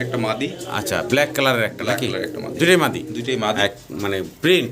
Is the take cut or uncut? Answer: cut